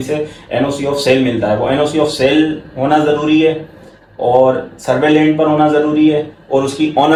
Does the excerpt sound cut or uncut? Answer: uncut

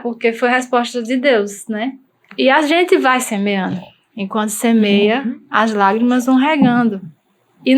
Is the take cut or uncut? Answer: cut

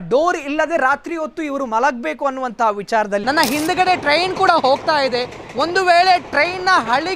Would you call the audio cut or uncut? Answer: cut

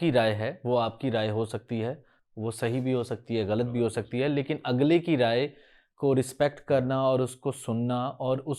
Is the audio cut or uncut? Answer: uncut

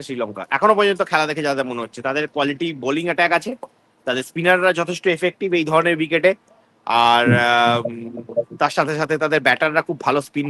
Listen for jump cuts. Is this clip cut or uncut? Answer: uncut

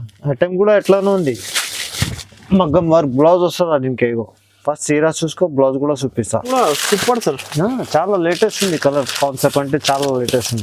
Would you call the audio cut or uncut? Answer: cut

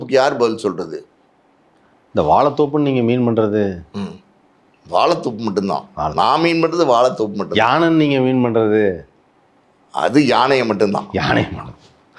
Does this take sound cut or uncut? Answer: uncut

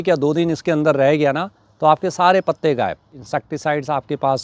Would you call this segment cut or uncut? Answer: cut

